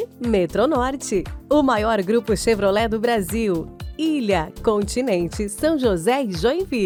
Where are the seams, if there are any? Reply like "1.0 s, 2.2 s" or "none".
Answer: none